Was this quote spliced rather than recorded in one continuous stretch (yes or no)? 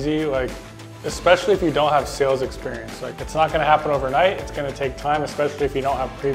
yes